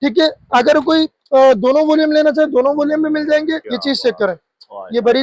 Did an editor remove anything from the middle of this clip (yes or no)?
yes